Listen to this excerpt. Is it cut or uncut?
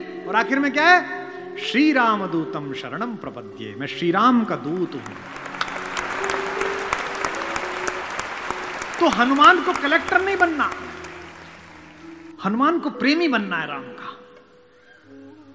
cut